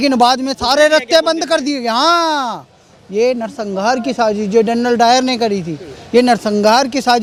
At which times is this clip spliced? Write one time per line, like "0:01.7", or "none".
none